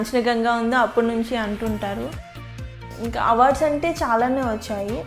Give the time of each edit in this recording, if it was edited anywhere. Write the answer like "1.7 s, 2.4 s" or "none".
2.8 s